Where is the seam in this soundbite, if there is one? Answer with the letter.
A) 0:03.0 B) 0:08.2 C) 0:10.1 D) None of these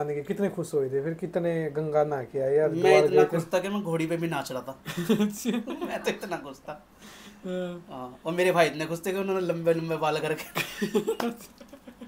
D